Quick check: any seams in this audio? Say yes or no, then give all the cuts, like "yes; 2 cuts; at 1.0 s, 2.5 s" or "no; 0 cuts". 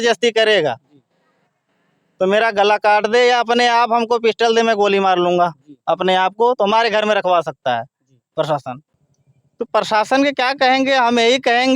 yes; 1 cut; at 8.9 s